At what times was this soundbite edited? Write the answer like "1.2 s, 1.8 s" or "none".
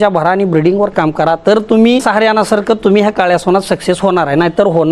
2.0 s